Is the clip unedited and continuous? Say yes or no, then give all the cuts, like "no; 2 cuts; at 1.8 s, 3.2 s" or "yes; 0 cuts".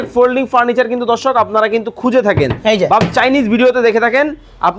yes; 0 cuts